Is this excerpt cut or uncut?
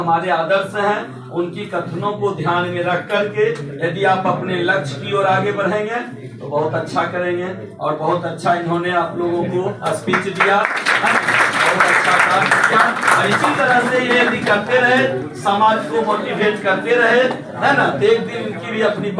uncut